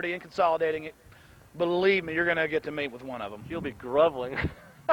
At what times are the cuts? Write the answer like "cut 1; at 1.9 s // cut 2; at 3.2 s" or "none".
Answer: none